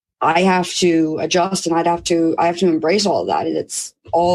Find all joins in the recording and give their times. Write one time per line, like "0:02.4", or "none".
none